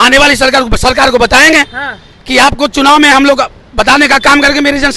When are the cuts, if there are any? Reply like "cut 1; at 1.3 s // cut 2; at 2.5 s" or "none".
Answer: none